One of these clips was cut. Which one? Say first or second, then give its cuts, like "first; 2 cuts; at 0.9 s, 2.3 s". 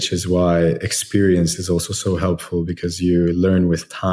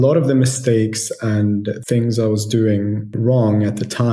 second; 2 cuts; at 1.8 s, 3.1 s